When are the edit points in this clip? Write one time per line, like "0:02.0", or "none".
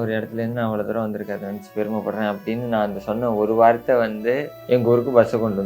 0:04.5